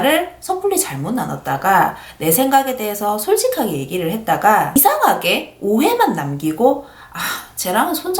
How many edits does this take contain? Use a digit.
0